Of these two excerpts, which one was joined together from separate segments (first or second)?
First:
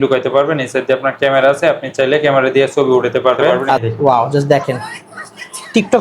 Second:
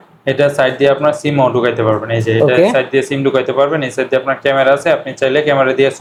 first